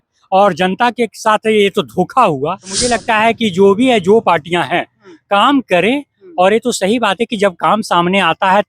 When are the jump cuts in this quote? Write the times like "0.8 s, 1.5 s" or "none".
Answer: 2.8 s